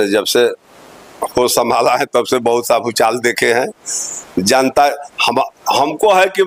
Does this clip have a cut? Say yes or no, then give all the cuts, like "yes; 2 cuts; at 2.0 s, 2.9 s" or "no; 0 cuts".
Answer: no; 0 cuts